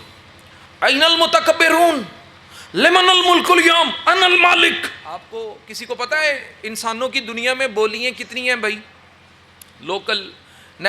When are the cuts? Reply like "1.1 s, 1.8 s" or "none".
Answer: 5.3 s